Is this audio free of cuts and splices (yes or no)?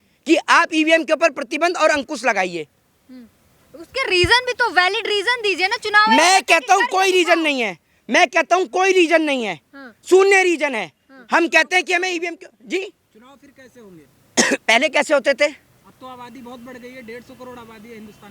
yes